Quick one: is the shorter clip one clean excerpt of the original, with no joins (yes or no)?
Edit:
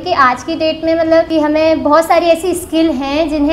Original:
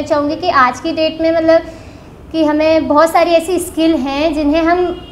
no